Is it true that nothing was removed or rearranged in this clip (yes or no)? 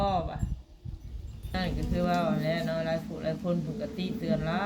no